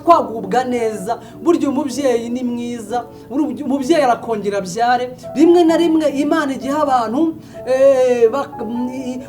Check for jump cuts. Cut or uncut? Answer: cut